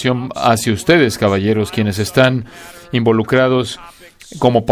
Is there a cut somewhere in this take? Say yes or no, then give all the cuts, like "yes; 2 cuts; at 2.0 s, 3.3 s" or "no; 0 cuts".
no; 0 cuts